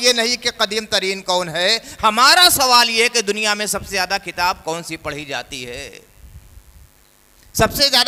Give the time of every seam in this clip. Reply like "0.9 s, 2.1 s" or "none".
none